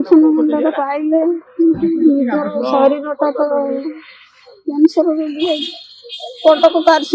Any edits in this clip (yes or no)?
no